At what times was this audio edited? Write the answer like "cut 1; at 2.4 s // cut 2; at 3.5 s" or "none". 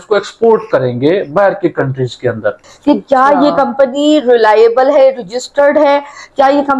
cut 1; at 2.6 s